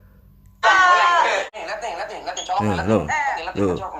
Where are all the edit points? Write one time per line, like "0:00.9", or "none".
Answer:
0:01.6